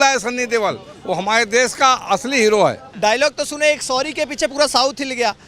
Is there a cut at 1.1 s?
no; 1 cut; at 2.9 s

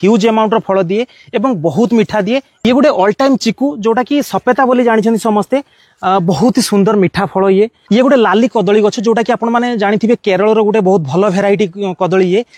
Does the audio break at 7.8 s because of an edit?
yes; 2 cuts; at 2.5 s, 7.8 s

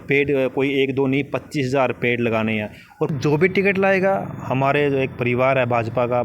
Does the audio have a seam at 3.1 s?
yes; 1 cut; at 3.1 s

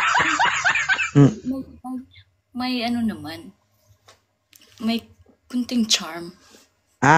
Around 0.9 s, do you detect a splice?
yes; 1 cut; at 0.9 s

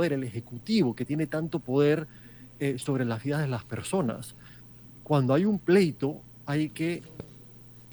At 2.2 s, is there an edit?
no; 0 cuts

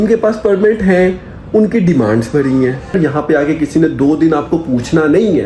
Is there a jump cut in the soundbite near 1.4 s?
no; 1 cut; at 3.0 s

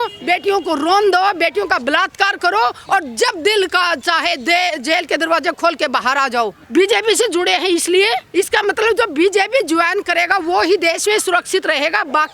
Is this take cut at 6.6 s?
yes; 2 cuts; at 6.6 s, 8.3 s

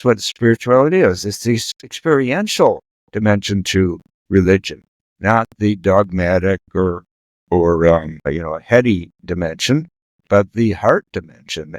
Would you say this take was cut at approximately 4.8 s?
no; 1 cut; at 8.1 s

